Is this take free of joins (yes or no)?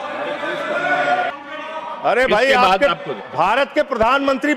no